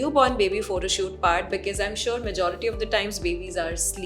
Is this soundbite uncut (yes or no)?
yes